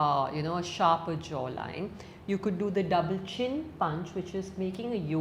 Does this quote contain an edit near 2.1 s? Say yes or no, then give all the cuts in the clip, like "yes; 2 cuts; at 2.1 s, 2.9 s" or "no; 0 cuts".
no; 0 cuts